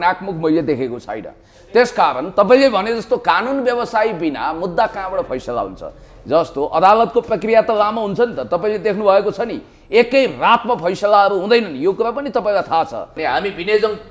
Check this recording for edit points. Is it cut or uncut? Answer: cut